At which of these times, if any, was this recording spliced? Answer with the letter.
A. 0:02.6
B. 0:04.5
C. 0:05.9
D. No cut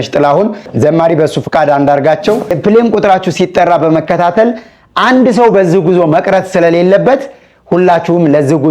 A